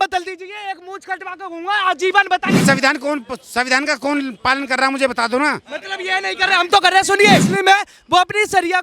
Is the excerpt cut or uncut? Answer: cut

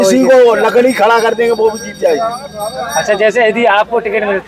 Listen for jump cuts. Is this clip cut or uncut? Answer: uncut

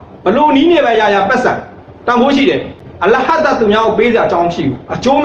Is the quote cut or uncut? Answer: cut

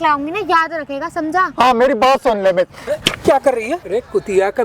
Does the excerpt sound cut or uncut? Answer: cut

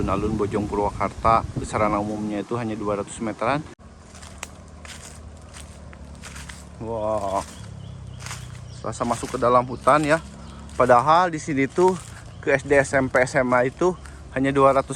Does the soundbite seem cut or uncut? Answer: cut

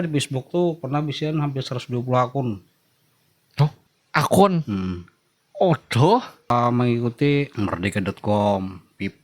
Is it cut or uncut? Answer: cut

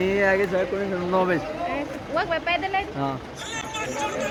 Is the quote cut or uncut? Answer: uncut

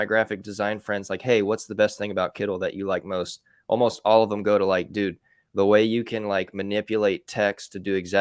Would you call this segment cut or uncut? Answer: uncut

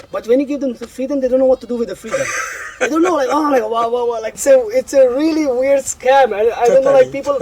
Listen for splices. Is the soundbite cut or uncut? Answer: cut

